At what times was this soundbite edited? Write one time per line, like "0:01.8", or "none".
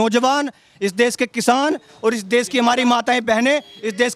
none